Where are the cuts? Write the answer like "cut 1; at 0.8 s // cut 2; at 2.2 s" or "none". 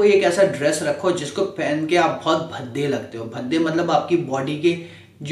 none

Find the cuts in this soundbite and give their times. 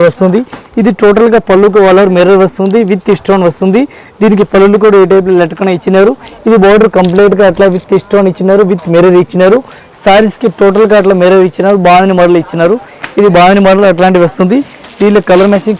none

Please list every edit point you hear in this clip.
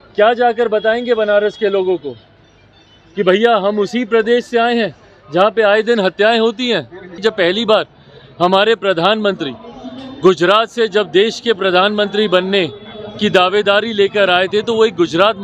cut 1; at 7.1 s

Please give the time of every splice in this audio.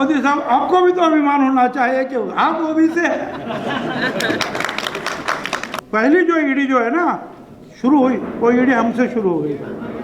cut 1; at 5.7 s

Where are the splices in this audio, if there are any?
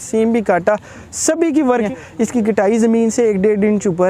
cut 1; at 1.9 s

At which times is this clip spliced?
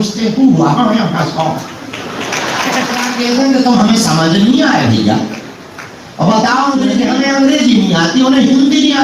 cut 1; at 3.1 s // cut 2; at 7.0 s

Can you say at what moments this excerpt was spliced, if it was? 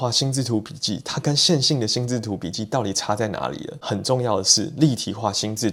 none

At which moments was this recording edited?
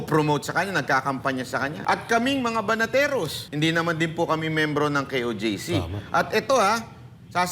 cut 1; at 1.8 s // cut 2; at 3.4 s

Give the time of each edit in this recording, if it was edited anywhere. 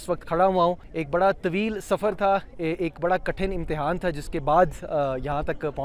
cut 1; at 0.9 s

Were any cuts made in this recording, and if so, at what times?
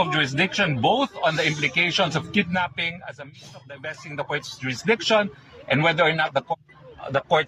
cut 1; at 6.5 s

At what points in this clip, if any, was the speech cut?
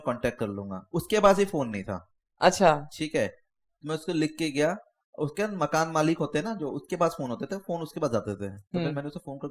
none

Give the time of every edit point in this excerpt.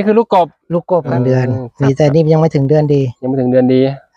cut 1; at 1.1 s

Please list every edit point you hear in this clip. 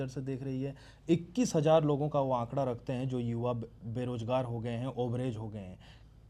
none

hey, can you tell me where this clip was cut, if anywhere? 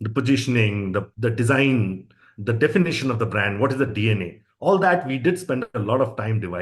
cut 1; at 1.1 s

